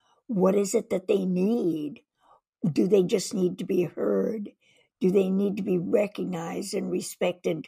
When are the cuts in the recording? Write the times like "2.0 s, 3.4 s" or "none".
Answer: none